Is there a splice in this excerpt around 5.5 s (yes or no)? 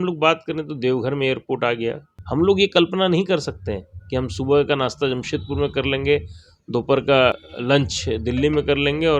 no